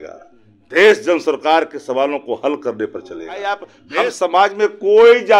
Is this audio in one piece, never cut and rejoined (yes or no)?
no